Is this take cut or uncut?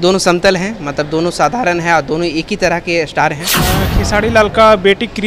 cut